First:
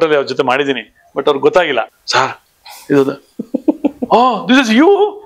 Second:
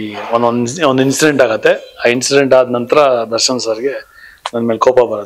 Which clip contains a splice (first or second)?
first